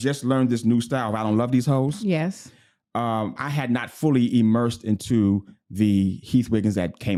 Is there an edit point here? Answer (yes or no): no